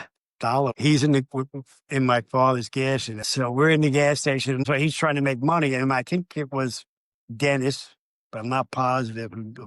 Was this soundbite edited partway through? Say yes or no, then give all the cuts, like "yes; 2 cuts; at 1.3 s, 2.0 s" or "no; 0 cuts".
yes; 2 cuts; at 3.2 s, 4.6 s